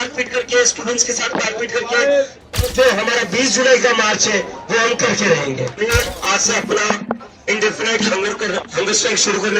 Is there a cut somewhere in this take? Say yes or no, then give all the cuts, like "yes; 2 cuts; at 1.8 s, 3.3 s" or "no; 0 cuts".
yes; 2 cuts; at 2.4 s, 5.7 s